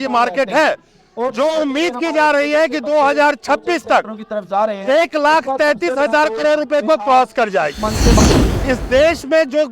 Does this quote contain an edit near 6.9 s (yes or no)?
no